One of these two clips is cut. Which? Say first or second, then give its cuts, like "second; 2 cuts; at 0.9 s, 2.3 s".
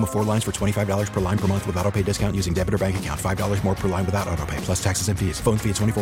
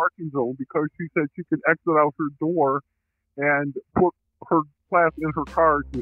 second; 1 cut; at 4.8 s